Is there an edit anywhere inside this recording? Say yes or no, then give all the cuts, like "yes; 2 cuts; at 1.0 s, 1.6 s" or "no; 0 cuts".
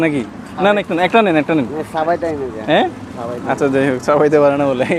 no; 0 cuts